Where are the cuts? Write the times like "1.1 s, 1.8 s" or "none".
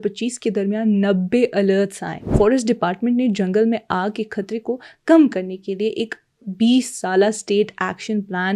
2.3 s